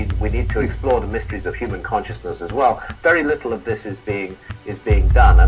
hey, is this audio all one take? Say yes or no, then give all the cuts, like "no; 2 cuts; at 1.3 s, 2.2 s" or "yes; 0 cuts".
yes; 0 cuts